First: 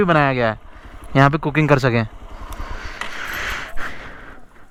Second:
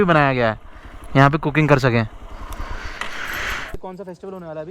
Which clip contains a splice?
second; 1 cut; at 3.8 s

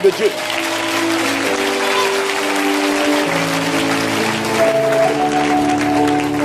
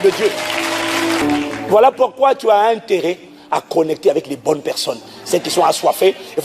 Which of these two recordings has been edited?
second; 1 cut; at 1.2 s

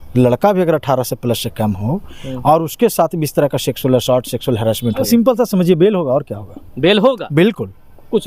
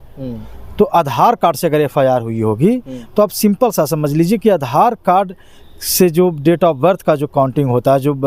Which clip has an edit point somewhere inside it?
first; 1 cut; at 5.0 s

